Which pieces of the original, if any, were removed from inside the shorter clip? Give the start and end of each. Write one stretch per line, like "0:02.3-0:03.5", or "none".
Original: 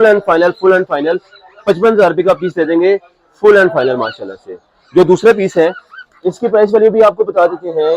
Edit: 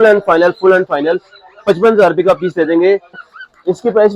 0:03.3-0:05.8